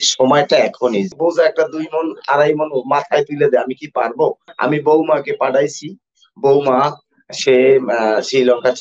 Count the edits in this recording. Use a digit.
2